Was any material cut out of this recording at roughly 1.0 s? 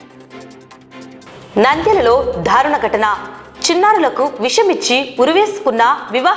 yes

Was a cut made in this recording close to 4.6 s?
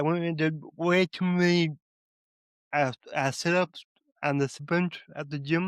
yes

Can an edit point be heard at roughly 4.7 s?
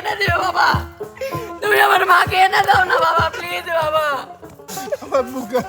yes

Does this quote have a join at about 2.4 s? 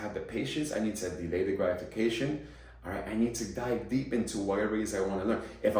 no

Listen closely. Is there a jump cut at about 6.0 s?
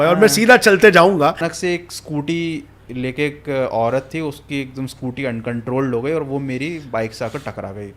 no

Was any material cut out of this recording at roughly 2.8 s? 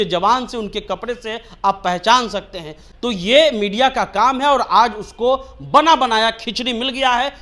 yes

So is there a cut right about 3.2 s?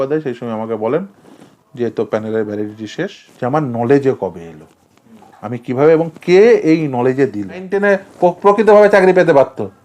yes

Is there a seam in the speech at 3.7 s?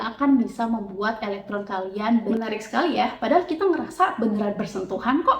no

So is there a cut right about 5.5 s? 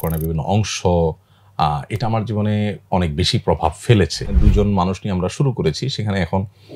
no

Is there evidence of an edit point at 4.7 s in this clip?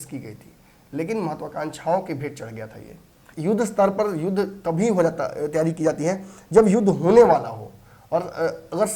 no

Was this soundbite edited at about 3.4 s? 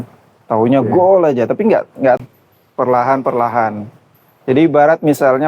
no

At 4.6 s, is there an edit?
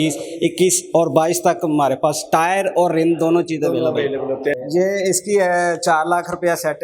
yes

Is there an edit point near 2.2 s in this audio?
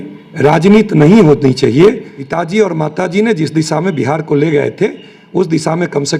yes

